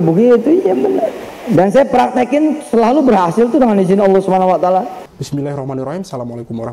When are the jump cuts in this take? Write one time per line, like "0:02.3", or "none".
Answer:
0:01.3
0:05.1